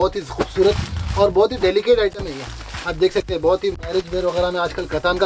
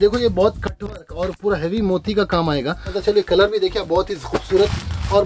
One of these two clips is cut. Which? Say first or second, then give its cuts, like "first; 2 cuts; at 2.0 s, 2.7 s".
second; 1 cut; at 3.0 s